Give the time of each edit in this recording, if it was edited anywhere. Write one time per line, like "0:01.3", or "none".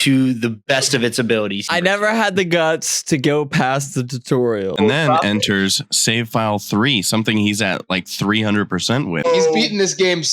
0:01.7
0:04.7
0:09.2